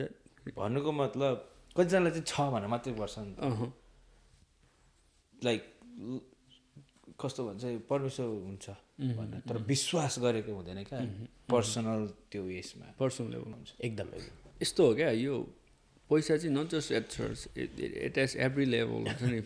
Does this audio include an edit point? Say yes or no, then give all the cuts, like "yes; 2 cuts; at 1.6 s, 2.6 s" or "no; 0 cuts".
yes; 1 cut; at 13.5 s